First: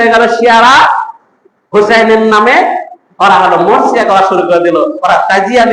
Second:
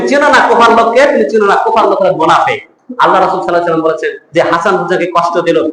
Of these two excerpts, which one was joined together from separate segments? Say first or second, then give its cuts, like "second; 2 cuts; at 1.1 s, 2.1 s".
second; 1 cut; at 2.8 s